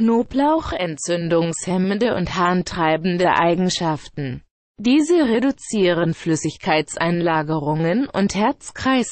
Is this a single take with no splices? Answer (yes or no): yes